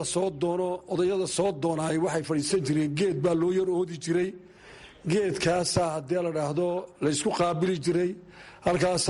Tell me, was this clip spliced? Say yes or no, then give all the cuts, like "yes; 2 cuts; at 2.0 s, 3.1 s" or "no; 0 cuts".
no; 0 cuts